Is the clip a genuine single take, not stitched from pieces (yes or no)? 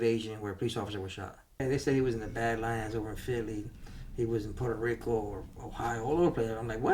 no